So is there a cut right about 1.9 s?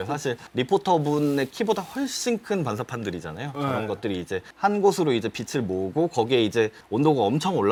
no; 0 cuts

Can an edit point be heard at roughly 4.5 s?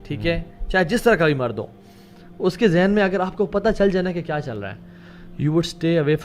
no; 0 cuts

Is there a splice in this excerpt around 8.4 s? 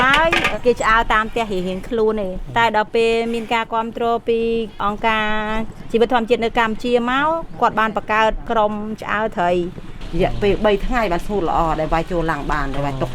yes; 4 cuts; at 2.4 s, 4.8 s, 8.4 s, 10.0 s

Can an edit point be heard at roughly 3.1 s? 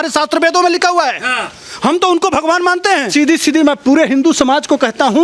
yes; 1 cut; at 3.1 s

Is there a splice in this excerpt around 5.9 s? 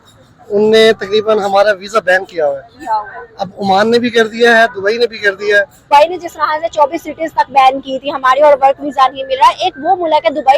yes; 1 cut; at 5.9 s

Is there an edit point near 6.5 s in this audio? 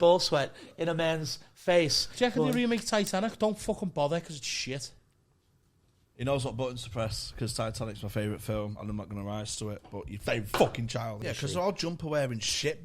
no; 2 cuts; at 2.1 s, 11.2 s

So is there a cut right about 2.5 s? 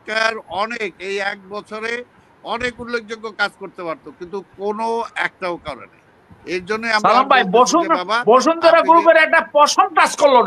no; 0 cuts

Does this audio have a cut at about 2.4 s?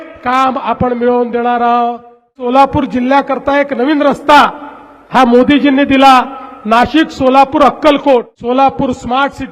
yes; 2 cuts; at 2.4 s, 8.3 s

